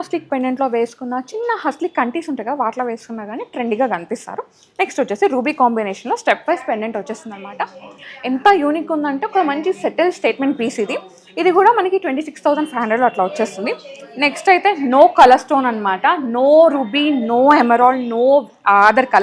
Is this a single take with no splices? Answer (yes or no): yes